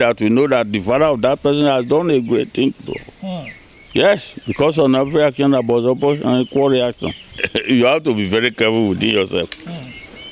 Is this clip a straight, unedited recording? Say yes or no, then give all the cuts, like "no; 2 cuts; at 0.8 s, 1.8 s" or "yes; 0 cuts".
no; 1 cut; at 7.3 s